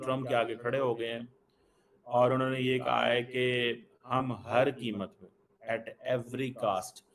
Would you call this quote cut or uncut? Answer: uncut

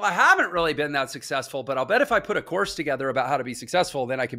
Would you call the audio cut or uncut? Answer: uncut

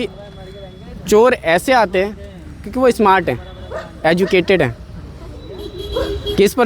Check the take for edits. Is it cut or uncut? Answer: uncut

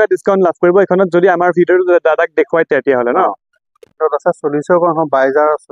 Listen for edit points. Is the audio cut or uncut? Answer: cut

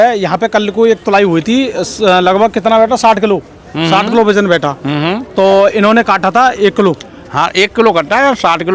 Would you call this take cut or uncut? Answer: uncut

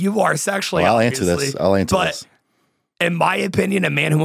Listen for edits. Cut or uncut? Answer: uncut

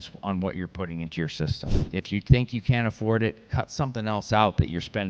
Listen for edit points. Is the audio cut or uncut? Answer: uncut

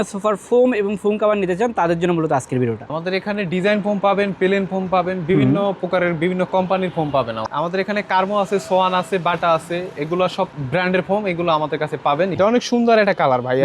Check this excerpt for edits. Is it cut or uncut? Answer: cut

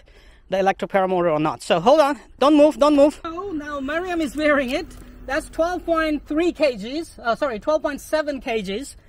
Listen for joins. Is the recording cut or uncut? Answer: uncut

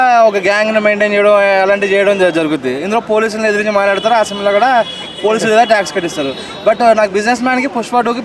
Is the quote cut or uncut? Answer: uncut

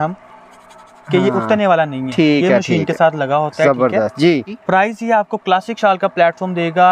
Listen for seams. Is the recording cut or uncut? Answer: cut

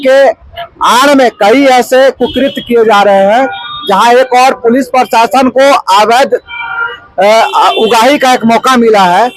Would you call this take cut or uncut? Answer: uncut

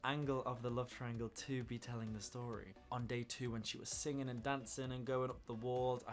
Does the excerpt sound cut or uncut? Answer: cut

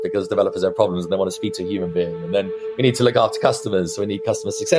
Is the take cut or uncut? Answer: uncut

